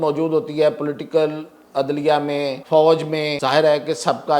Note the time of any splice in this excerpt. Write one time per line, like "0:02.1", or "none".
0:02.6
0:03.3